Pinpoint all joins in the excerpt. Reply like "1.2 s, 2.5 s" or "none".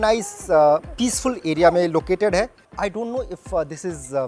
2.8 s